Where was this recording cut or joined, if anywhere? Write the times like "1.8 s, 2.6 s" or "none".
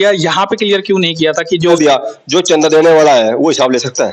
1.7 s